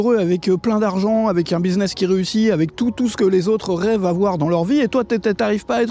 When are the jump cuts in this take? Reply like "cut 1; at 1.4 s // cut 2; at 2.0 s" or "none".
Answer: none